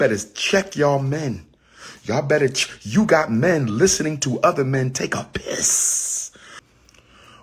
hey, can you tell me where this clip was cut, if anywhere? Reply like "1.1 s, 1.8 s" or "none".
6.5 s

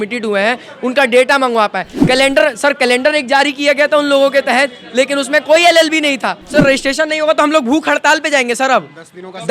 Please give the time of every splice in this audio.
1.9 s, 6.4 s

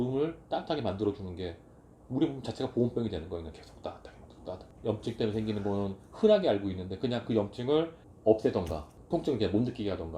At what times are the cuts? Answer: 4.6 s

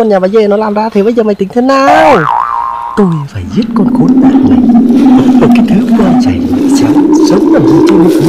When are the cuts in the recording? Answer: none

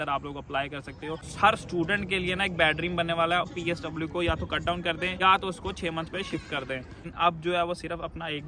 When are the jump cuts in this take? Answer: 1.3 s, 3.5 s, 5.2 s, 7.0 s

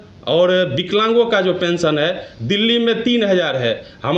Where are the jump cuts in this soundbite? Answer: none

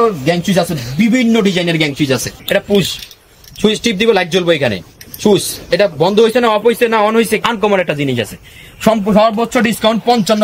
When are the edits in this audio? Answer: none

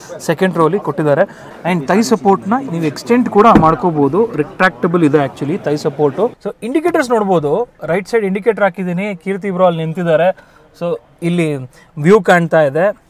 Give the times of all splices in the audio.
1.4 s, 6.4 s

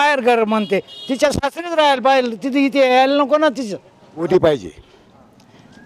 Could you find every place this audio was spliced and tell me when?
4.2 s

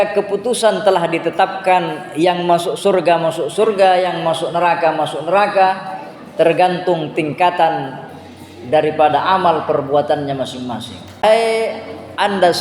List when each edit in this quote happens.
11.2 s

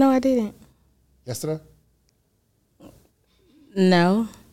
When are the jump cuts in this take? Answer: none

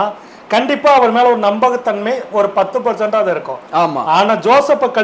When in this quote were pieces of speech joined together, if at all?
none

